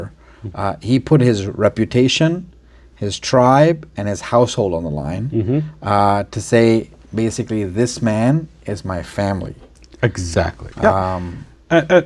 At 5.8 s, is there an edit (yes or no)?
no